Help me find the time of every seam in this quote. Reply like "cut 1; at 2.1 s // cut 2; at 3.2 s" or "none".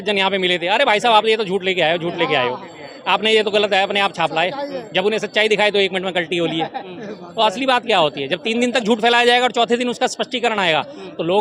none